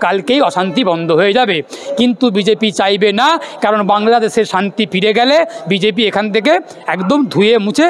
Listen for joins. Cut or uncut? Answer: uncut